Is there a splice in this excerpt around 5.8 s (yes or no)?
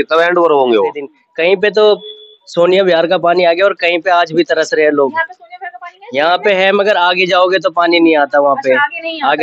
no